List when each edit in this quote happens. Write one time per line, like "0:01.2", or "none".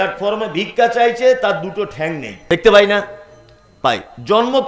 0:02.3